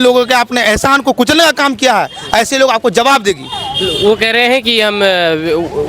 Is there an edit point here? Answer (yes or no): no